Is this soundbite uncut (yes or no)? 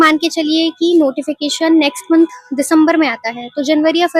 yes